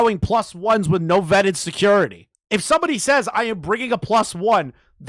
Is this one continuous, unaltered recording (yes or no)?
yes